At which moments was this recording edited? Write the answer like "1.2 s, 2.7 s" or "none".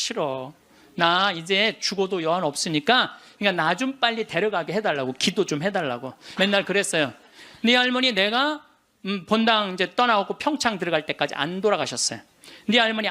3.2 s, 6.2 s